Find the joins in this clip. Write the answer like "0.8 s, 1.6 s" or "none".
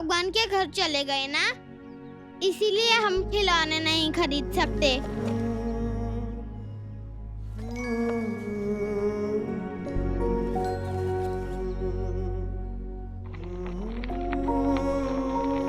5.0 s